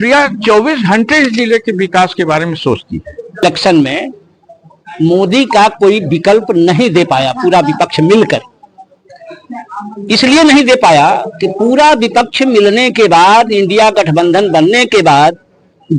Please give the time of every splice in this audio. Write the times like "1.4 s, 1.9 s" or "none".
3.4 s